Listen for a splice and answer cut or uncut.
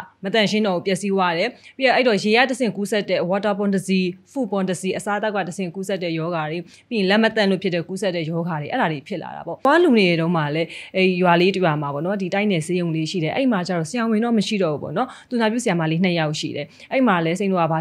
cut